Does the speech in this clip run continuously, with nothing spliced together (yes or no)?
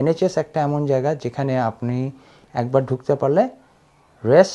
yes